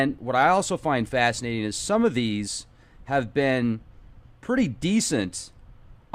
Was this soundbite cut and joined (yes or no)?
yes